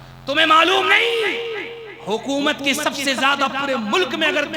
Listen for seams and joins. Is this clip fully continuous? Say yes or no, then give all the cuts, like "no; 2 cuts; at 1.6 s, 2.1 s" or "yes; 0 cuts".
yes; 0 cuts